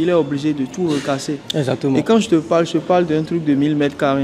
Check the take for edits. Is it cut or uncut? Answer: uncut